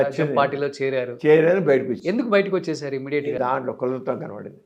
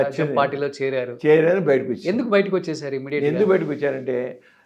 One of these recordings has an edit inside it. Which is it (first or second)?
first